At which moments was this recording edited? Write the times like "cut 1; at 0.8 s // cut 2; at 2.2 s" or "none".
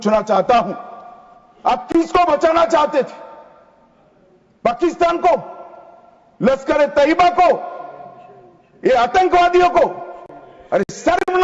none